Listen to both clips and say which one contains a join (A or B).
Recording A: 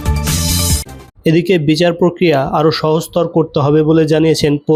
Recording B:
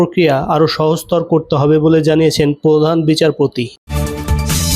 B